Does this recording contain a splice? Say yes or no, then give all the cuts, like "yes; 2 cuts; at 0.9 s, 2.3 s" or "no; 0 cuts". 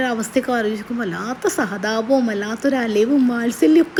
no; 0 cuts